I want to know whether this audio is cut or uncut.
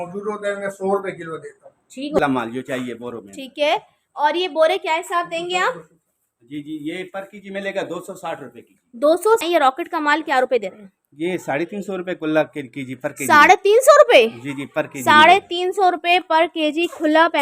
cut